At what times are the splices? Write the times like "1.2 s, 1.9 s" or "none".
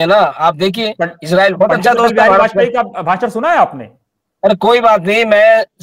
none